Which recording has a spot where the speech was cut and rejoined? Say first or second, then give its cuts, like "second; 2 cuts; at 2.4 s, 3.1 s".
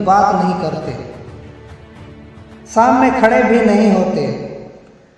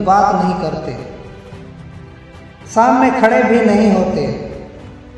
first; 2 cuts; at 1.2 s, 2.7 s